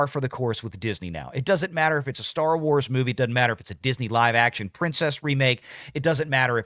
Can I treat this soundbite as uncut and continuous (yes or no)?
yes